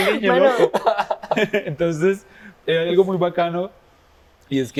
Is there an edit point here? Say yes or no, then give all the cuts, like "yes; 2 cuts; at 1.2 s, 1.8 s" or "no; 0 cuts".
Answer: no; 0 cuts